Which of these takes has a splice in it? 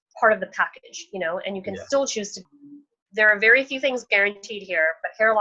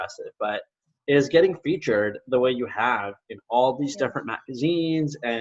first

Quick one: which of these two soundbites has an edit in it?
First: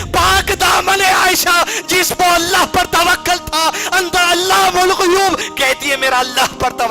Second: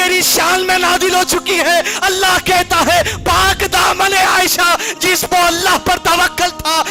first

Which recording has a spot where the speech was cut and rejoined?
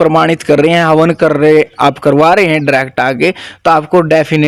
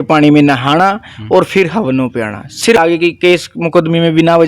second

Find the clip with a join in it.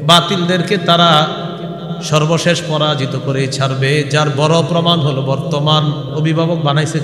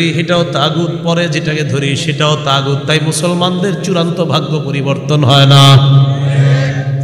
first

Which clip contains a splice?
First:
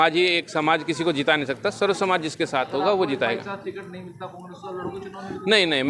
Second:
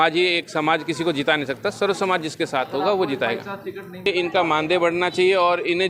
second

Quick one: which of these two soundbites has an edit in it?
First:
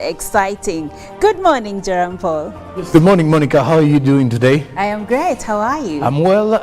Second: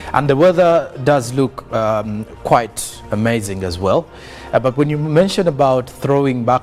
first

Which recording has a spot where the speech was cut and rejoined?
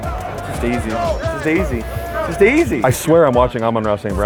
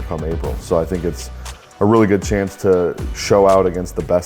second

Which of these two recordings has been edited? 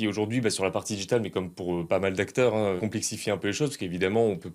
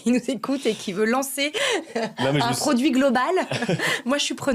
first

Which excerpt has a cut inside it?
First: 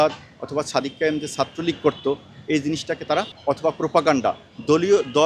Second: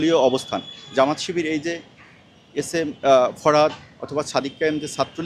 first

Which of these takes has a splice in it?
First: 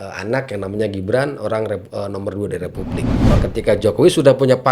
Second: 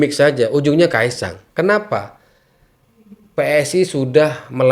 first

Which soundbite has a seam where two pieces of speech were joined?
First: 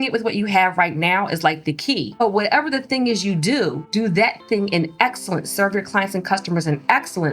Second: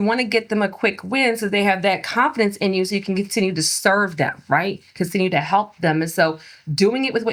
first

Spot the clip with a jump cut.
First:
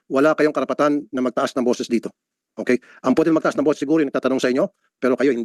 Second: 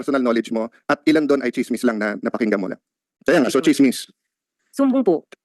second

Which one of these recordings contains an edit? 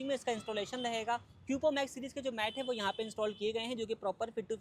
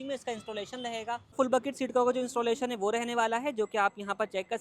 second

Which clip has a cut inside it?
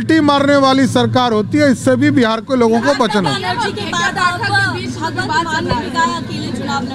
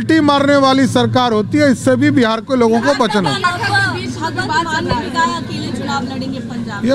second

